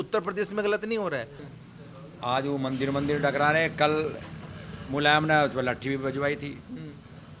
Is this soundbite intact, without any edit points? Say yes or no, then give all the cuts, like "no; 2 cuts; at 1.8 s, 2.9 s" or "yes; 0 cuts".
no; 1 cut; at 1.4 s